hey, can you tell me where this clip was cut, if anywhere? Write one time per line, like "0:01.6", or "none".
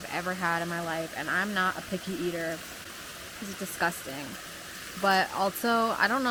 none

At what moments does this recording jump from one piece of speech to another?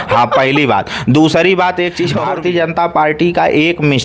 0:02.1

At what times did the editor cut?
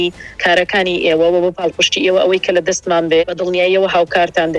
0:03.2

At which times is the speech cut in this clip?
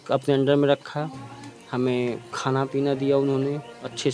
none

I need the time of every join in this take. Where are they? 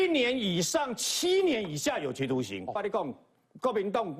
0:02.8

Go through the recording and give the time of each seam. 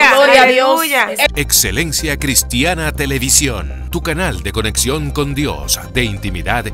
0:01.3

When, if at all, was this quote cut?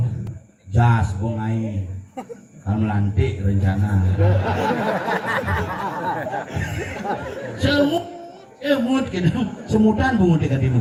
none

